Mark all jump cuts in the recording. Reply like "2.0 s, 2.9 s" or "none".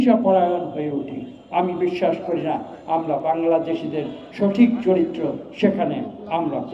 none